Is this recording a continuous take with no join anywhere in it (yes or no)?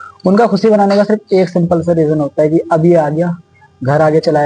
yes